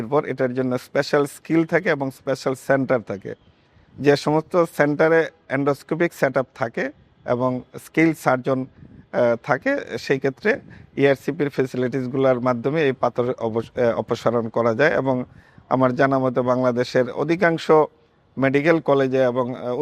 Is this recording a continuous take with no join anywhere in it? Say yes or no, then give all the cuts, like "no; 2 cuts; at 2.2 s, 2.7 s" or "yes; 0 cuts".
yes; 0 cuts